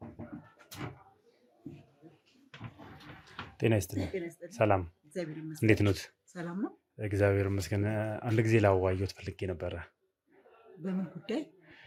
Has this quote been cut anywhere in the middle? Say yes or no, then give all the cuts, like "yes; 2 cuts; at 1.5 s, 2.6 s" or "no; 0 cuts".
no; 0 cuts